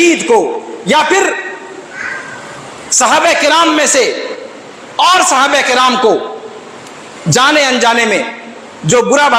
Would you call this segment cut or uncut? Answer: uncut